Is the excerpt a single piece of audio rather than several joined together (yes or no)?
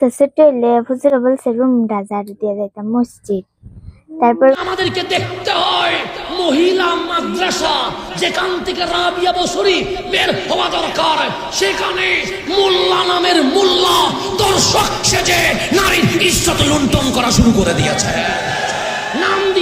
no